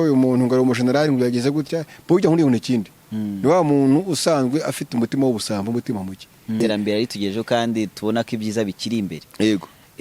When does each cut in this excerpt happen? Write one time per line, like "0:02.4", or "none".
0:06.6